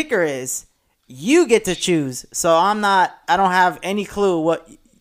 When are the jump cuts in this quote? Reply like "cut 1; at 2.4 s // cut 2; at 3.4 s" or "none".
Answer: none